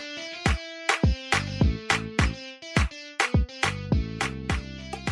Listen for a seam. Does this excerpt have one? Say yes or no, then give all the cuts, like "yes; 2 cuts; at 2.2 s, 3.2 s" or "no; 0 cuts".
no; 0 cuts